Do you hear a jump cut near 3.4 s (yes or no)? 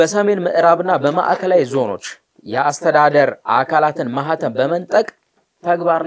no